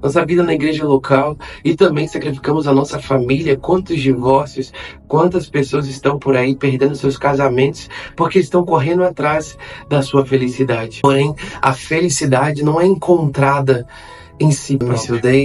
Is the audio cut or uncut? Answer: cut